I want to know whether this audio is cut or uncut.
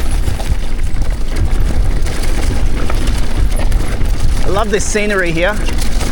uncut